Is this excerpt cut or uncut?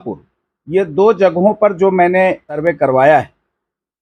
cut